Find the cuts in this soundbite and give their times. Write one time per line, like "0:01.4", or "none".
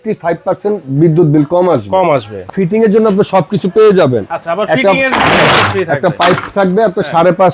0:02.4